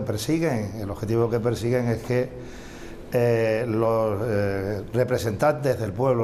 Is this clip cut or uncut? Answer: cut